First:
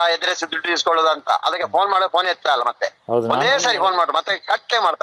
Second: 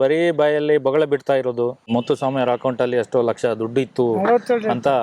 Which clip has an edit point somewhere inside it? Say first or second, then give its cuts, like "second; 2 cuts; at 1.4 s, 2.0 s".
second; 1 cut; at 1.9 s